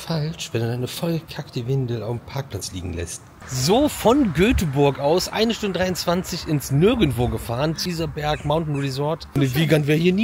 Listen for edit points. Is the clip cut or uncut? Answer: cut